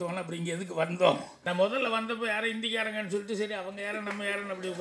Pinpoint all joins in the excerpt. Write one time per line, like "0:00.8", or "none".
0:01.3